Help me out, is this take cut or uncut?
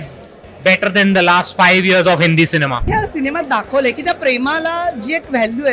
cut